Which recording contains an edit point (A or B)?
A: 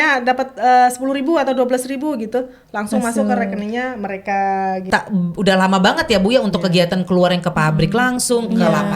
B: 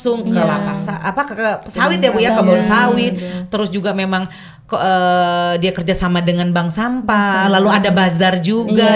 A